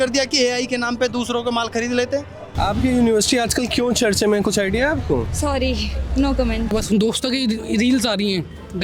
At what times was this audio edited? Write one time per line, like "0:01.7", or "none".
0:02.4
0:06.7